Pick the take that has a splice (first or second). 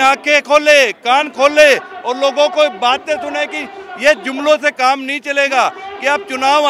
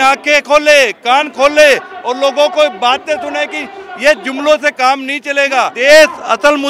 second